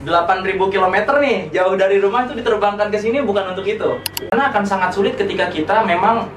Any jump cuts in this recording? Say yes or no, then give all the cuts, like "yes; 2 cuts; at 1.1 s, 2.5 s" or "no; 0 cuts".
yes; 1 cut; at 4.3 s